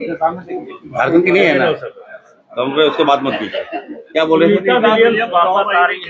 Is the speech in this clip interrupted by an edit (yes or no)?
no